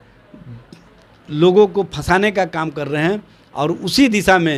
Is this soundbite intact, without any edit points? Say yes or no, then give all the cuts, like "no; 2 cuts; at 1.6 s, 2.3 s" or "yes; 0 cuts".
yes; 0 cuts